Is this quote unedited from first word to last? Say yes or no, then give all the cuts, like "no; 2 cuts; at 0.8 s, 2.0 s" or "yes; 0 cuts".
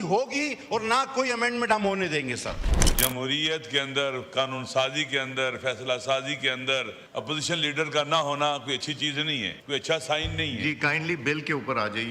no; 3 cuts; at 2.7 s, 7.0 s, 9.5 s